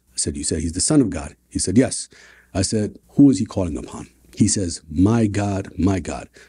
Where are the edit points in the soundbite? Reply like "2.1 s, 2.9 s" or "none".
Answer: none